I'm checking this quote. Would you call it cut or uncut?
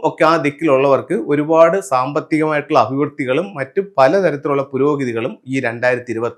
uncut